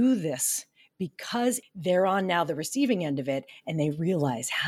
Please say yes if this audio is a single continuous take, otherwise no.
no